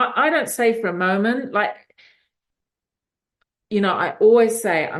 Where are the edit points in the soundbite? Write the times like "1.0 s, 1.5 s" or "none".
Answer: none